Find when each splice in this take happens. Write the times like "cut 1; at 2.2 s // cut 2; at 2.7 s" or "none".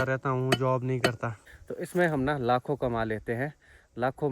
cut 1; at 1.4 s